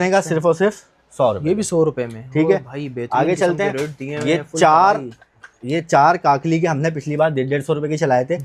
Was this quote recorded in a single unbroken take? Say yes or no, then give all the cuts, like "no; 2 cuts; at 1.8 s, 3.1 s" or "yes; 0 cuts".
yes; 0 cuts